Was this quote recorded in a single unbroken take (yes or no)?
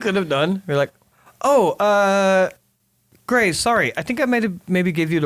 yes